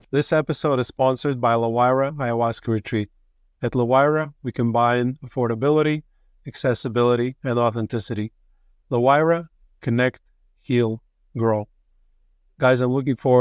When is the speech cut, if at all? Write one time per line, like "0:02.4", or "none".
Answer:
none